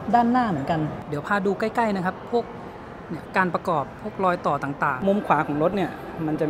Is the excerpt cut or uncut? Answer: cut